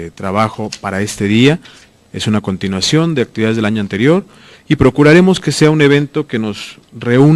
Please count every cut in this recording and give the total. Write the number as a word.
zero